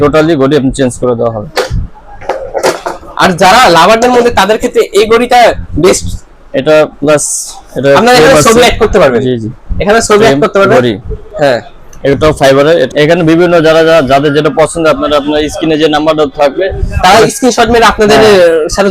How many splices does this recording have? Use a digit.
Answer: 1